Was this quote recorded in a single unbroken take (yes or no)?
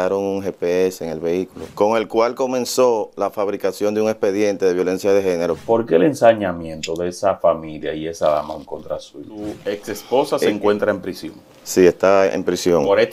no